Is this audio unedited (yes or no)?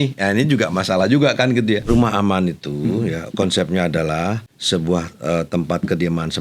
no